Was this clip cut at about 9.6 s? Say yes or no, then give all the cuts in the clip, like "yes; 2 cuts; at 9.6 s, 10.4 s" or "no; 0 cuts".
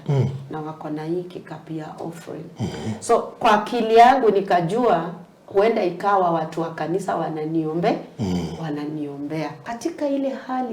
yes; 1 cut; at 9.6 s